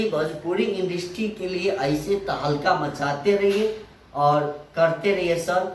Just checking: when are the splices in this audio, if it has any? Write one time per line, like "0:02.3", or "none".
none